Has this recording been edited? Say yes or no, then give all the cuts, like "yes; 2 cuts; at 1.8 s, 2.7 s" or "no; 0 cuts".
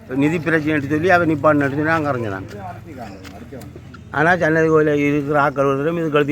no; 0 cuts